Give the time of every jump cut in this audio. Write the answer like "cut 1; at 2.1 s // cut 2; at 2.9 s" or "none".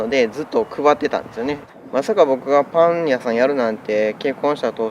cut 1; at 1.7 s